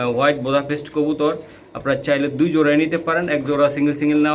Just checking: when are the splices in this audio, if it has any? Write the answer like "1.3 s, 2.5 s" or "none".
none